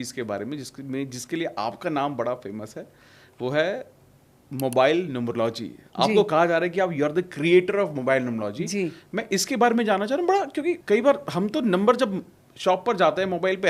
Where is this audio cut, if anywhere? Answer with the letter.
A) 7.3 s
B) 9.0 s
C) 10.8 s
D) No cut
C